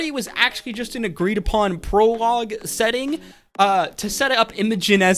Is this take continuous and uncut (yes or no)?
yes